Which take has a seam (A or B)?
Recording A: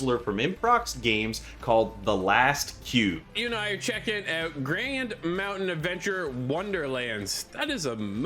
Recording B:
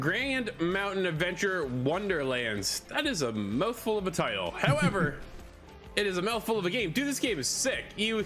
A